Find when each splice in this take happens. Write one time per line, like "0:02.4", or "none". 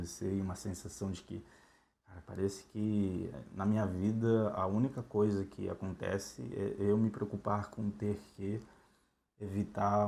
none